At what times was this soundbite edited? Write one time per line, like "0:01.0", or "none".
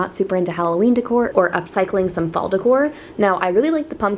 none